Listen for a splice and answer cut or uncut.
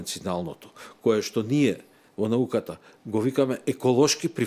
uncut